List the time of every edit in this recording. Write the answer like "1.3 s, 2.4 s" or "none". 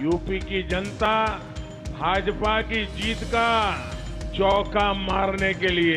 1.1 s